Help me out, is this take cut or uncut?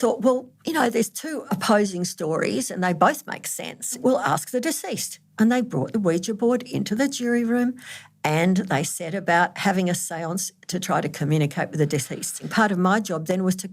cut